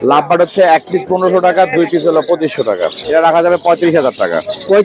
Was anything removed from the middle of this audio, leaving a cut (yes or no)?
yes